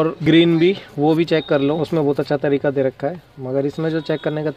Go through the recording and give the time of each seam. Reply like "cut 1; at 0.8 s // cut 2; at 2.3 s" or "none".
none